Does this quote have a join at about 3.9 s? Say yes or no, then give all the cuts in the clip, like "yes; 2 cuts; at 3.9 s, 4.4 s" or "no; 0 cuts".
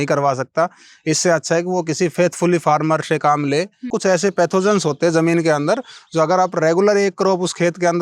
yes; 1 cut; at 3.9 s